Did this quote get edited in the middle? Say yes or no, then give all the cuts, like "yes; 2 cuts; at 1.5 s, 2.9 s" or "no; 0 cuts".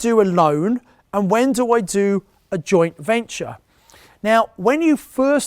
no; 0 cuts